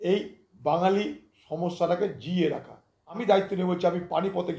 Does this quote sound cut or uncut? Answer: cut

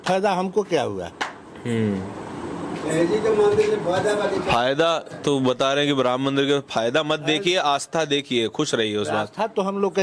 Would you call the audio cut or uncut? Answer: uncut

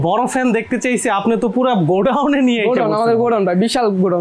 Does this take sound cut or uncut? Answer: uncut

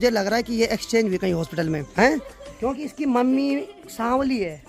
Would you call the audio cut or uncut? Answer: uncut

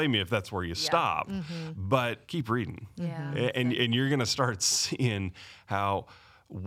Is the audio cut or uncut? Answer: cut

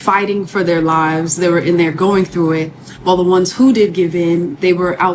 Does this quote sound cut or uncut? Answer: uncut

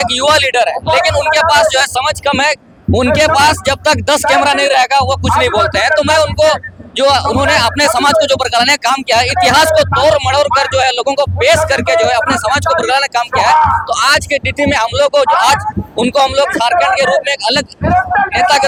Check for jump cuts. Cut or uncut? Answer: uncut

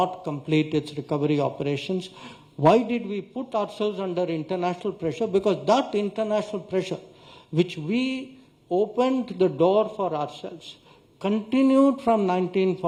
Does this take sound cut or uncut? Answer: uncut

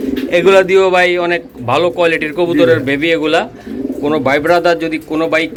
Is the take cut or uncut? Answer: uncut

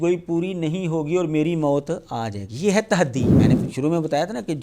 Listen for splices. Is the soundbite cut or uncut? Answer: cut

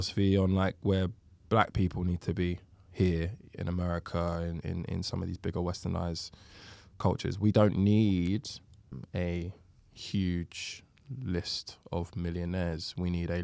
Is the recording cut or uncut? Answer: cut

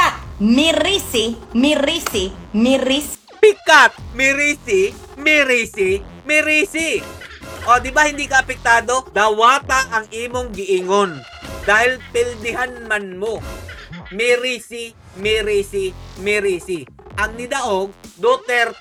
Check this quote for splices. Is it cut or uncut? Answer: uncut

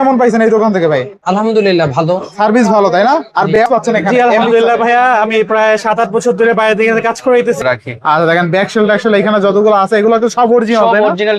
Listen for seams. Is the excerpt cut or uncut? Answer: cut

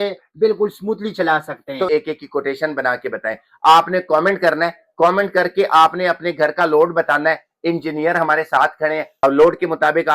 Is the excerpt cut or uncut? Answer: cut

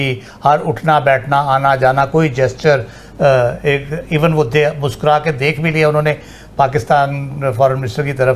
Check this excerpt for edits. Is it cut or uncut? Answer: uncut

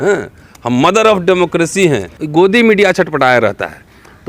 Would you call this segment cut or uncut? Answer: cut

